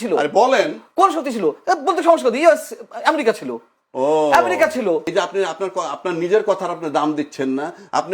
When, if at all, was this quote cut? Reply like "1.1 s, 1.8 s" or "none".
5.1 s

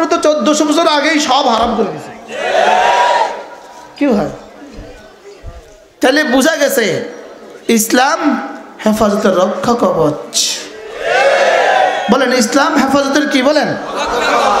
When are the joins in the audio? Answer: none

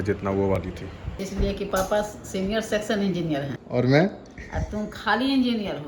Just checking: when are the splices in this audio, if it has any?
1.1 s

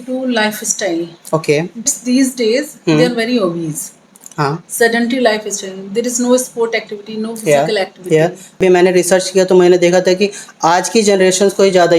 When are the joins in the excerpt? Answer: 1.9 s, 8.6 s

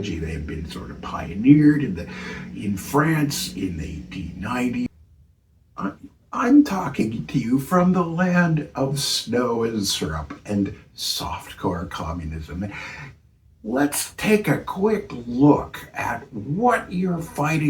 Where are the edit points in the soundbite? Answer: 4.9 s

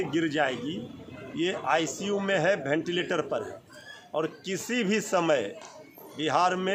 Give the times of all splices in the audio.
none

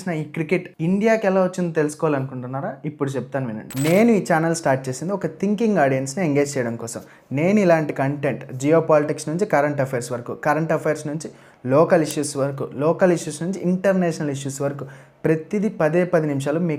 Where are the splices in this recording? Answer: none

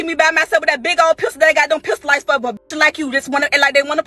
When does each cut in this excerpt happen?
none

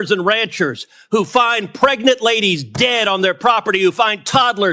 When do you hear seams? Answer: none

